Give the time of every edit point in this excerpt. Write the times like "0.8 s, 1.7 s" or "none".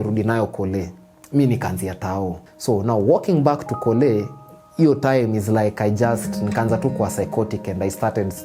2.5 s